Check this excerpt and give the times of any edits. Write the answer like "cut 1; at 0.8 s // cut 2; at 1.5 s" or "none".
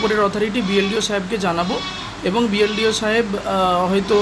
none